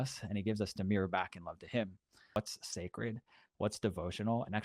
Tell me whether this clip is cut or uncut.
cut